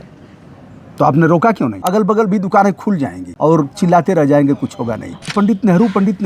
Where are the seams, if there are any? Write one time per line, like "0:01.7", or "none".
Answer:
0:01.8
0:03.2
0:05.2